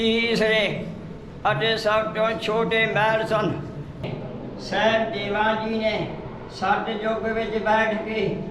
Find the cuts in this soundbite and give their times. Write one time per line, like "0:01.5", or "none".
0:04.1